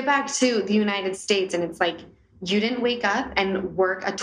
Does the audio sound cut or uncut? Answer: cut